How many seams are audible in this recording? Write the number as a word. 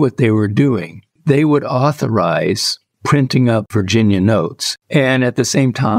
two